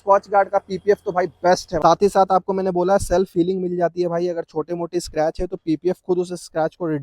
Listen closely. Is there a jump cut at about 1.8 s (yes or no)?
yes